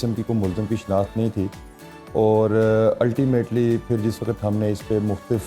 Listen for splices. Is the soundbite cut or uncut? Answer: uncut